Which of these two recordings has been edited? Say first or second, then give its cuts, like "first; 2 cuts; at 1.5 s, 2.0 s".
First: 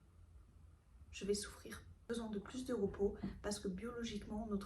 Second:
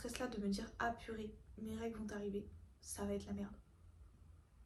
first; 1 cut; at 2.0 s